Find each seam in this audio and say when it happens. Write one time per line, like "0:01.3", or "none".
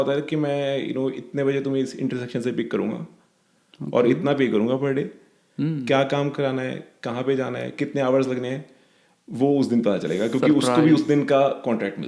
none

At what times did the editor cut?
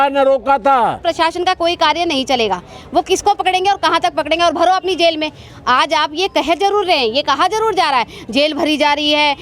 0:01.0

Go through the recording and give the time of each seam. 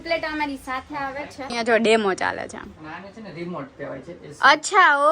0:01.5

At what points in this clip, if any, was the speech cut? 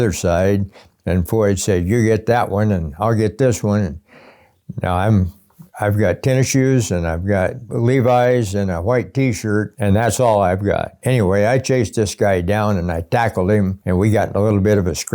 0:07.6
0:09.7
0:11.0
0:13.8

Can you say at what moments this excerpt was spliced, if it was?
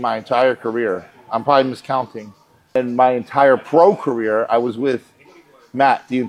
none

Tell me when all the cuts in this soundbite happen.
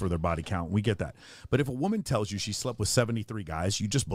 none

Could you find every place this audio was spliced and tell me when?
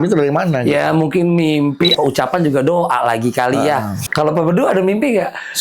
0:01.9
0:04.0

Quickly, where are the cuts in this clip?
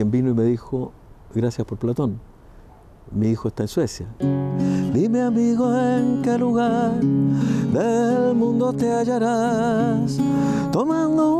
0:04.1

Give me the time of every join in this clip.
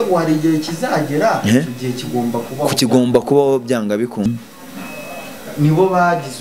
0:04.3

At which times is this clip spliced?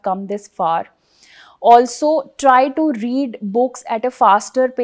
none

